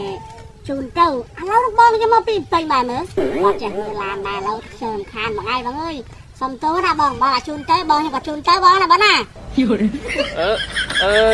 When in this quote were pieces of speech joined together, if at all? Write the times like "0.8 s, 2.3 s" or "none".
none